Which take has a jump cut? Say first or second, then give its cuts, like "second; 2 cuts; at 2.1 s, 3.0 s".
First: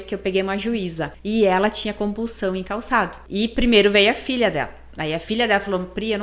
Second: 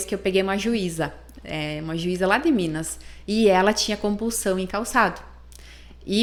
first; 2 cuts; at 1.1 s, 3.2 s